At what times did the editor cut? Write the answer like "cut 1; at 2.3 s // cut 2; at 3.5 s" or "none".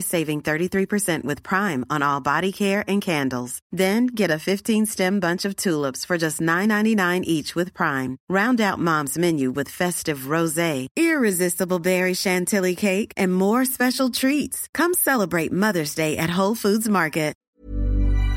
cut 1; at 17.4 s